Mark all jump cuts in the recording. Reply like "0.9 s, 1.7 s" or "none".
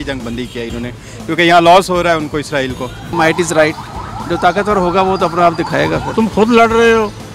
3.1 s, 6.1 s